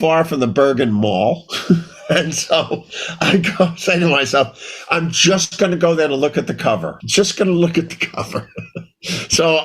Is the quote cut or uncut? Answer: cut